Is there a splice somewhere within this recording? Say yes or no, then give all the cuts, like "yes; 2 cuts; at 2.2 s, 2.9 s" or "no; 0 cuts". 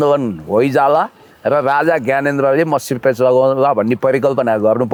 no; 0 cuts